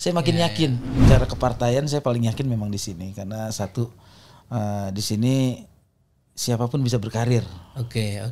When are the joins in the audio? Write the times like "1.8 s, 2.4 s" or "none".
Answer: 1.0 s